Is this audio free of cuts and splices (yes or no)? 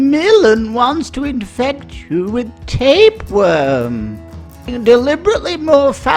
no